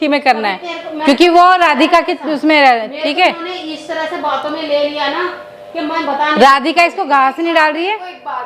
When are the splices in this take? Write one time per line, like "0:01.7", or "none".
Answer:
none